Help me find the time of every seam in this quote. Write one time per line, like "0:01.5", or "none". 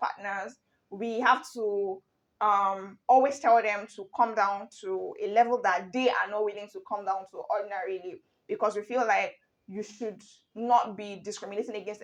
none